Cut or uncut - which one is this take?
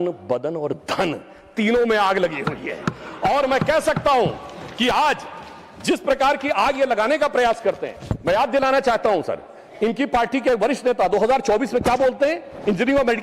uncut